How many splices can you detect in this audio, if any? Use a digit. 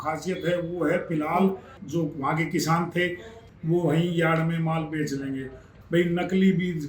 3